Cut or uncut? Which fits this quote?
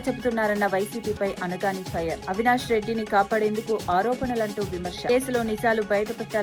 uncut